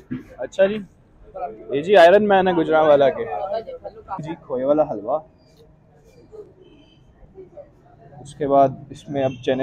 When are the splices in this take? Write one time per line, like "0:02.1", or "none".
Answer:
0:04.3